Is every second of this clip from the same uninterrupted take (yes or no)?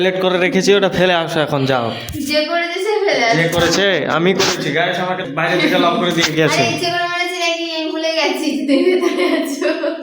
no